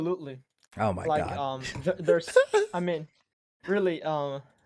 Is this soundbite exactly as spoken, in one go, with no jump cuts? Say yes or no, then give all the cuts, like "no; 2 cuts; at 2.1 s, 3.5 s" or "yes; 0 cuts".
yes; 0 cuts